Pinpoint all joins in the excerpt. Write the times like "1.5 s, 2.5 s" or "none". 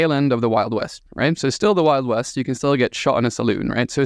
none